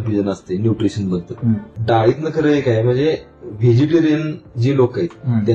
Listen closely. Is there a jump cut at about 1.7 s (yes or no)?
yes